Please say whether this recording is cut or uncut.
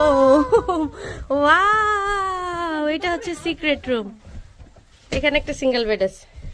uncut